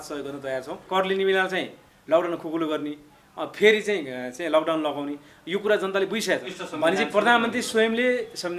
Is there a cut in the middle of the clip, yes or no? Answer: yes